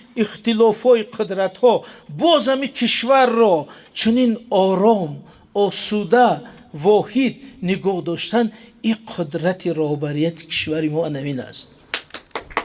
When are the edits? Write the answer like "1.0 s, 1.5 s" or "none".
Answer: none